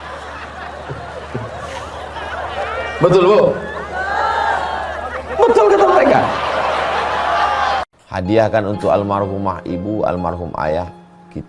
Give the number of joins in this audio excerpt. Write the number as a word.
one